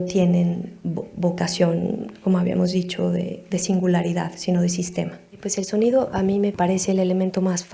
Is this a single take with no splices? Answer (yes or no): no